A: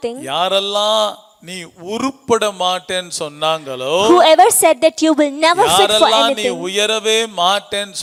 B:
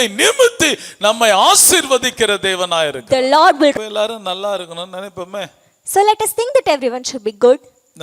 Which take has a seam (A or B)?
B